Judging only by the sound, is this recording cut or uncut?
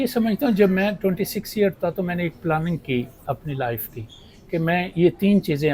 uncut